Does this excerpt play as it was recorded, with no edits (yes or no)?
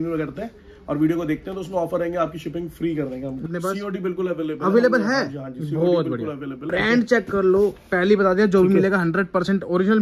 no